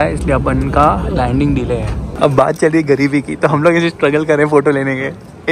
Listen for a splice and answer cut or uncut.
cut